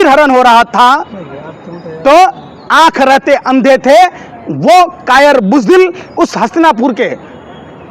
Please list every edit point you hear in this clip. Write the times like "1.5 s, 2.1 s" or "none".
none